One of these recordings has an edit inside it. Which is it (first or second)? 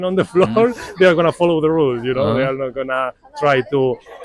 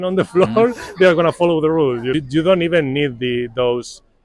second